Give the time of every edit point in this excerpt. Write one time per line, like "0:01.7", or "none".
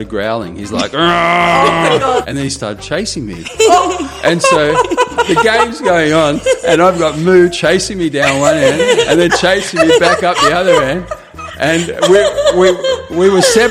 0:02.2